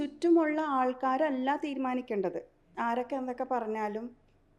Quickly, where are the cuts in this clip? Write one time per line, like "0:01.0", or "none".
0:02.7